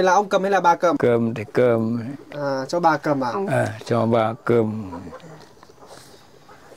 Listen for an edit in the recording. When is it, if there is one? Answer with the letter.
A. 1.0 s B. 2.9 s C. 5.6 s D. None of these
A